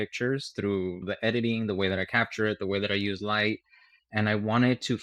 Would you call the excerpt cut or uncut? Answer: uncut